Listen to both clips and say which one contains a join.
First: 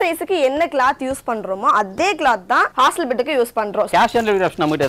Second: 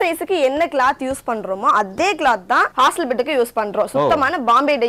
first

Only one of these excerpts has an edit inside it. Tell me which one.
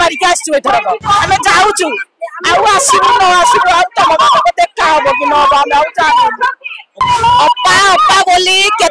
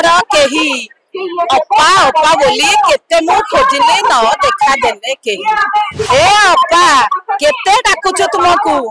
first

